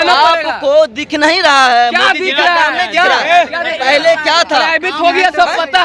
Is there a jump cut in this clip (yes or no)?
no